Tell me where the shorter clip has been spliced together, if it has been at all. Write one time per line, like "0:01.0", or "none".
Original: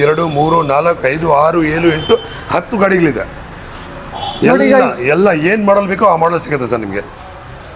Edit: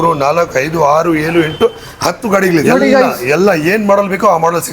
0:02.6